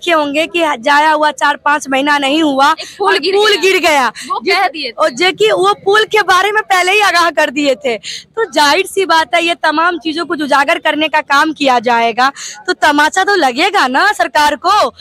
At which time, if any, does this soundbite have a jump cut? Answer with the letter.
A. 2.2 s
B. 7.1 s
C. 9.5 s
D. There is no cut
D